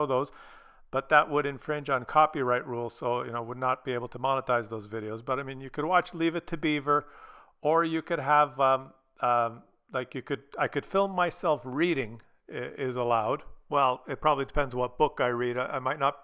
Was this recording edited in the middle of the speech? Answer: yes; 1 cut; at 13.5 s

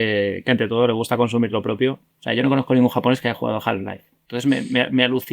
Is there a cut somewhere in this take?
yes; 1 cut; at 2.1 s

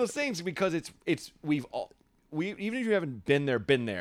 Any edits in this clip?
no; 0 cuts

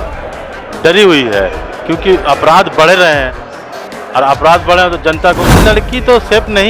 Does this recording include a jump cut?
yes; 1 cut; at 5.5 s

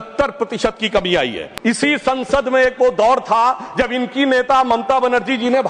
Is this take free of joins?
no; 1 cut; at 1.4 s

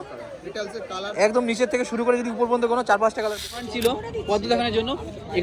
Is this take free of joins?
no; 1 cut; at 3.7 s

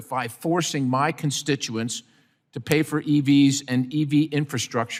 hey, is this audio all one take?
yes; 0 cuts

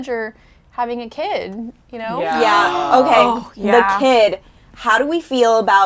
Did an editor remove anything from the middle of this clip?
no; 0 cuts

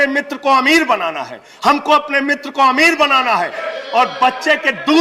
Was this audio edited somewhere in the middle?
yes; 1 cut; at 3.7 s

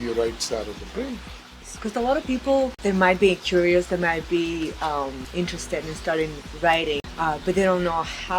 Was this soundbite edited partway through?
yes; 4 cuts; at 1.7 s, 2.8 s, 5.2 s, 7.1 s

